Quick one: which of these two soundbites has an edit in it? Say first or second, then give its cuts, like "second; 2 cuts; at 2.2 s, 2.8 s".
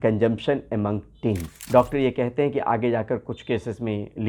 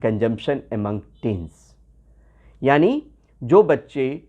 first; 1 cut; at 1.5 s